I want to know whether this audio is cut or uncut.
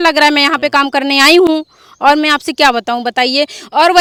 uncut